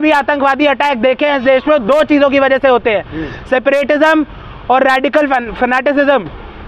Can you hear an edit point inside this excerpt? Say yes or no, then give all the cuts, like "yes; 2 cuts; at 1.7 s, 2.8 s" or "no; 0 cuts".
no; 0 cuts